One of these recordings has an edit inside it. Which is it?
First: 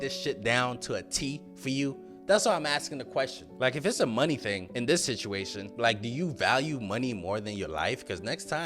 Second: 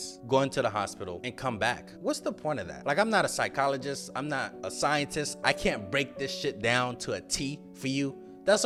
first; 1 cut; at 3.4 s

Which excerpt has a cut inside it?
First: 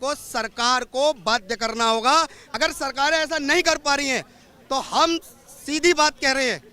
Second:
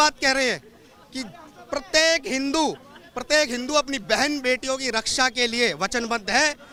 first; 1 cut; at 2.4 s

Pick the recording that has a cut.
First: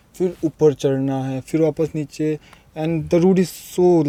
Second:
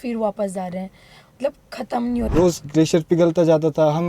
second; 1 cut; at 2.3 s

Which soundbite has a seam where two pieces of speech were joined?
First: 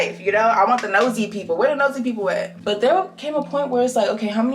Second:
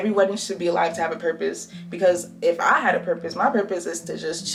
first; 1 cut; at 2.5 s

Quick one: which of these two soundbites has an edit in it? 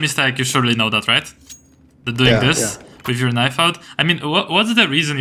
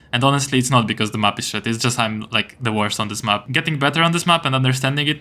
second; 1 cut; at 3.5 s

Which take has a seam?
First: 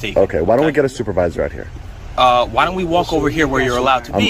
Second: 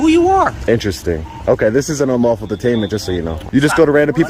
second; 1 cut; at 3.3 s

